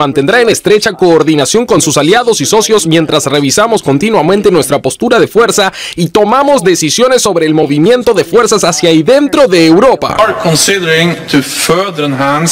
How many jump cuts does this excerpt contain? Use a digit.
1